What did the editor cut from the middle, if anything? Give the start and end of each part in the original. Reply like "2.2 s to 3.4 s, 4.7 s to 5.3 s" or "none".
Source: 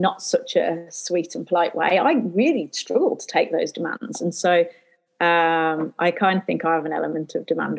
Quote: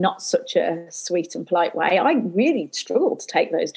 none